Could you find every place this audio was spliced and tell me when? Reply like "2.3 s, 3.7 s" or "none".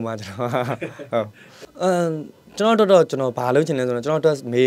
1.4 s